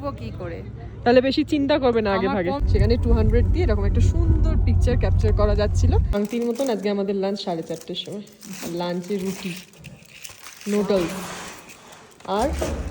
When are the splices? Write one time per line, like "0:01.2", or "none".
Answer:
0:02.6
0:06.1